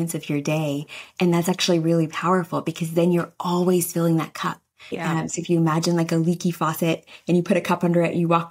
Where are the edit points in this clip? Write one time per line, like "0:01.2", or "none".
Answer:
0:05.0